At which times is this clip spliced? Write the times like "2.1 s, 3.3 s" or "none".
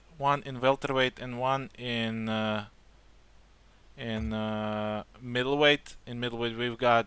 4.7 s